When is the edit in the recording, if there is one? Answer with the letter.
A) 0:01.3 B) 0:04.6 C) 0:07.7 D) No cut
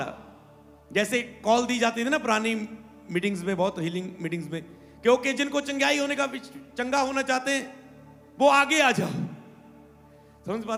D